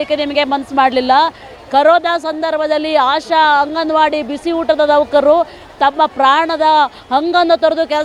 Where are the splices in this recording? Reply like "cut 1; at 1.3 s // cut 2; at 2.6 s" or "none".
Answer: none